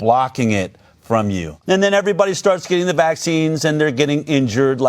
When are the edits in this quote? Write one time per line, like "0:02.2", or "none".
0:01.5